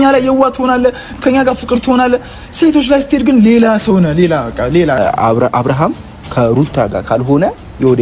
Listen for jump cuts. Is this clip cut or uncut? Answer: cut